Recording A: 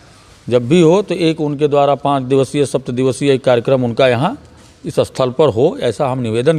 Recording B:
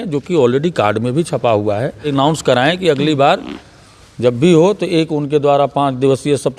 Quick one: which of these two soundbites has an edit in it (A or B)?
B